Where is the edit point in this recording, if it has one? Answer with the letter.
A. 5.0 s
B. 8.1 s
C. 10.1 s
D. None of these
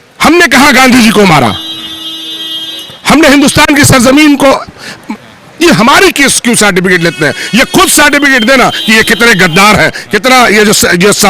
A